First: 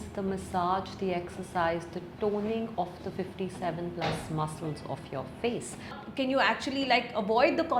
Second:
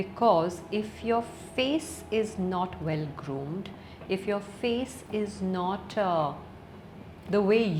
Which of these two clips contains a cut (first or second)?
first